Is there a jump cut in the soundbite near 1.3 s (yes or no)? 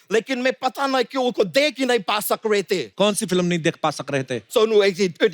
no